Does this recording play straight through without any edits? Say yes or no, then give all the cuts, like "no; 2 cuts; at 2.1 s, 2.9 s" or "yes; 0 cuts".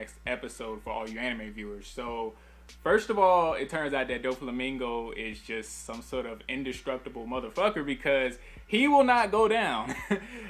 no; 1 cut; at 7.7 s